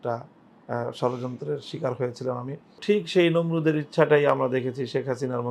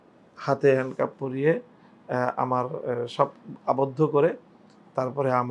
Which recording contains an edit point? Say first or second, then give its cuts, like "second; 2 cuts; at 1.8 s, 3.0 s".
first; 1 cut; at 2.8 s